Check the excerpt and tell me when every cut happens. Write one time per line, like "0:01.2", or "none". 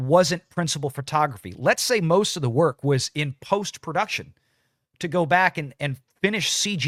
none